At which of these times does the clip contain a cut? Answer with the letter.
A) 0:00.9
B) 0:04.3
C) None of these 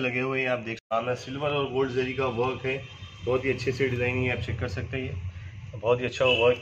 A